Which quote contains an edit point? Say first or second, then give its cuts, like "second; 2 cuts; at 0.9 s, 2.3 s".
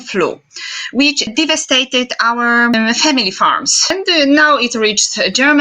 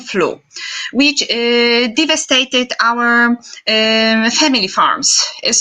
first; 3 cuts; at 1.3 s, 2.8 s, 3.9 s